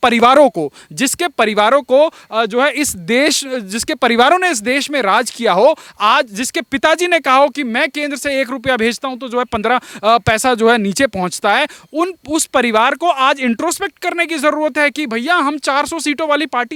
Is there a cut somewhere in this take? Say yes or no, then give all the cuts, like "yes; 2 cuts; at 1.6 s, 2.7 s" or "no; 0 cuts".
no; 0 cuts